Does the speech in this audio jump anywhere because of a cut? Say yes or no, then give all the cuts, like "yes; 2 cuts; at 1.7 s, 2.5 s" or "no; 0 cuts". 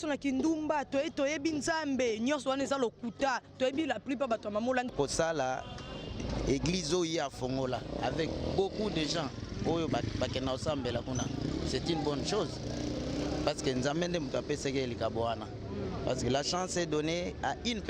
yes; 1 cut; at 4.9 s